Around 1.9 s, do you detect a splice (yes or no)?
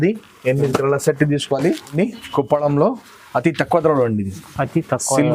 yes